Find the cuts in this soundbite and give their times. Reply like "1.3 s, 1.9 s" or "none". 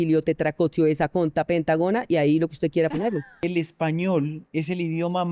3.3 s, 4.4 s